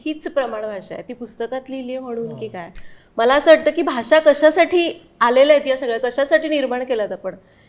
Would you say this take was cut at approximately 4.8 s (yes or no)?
no